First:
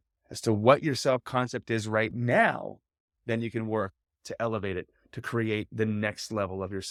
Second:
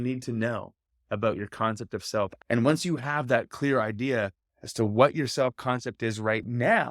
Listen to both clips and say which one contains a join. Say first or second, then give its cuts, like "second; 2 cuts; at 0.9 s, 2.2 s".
second; 1 cut; at 2.3 s